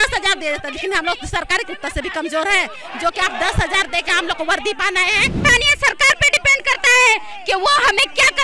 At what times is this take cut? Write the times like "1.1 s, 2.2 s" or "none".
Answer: 5.4 s